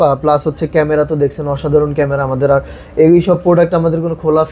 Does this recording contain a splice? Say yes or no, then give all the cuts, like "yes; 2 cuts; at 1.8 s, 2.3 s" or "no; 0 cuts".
no; 0 cuts